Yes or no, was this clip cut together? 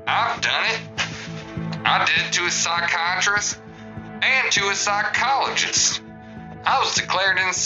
no